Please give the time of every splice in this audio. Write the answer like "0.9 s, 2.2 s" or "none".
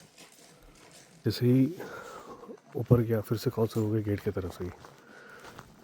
1.2 s